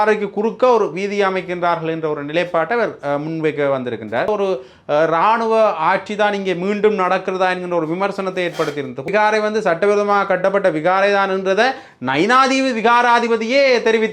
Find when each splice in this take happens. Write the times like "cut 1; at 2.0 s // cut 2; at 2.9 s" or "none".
cut 1; at 4.3 s // cut 2; at 9.1 s